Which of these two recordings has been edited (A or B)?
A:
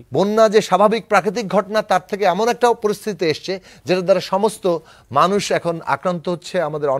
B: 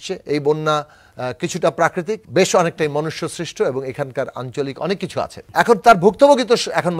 B